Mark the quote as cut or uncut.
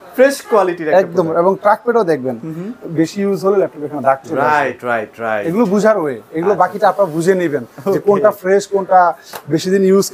uncut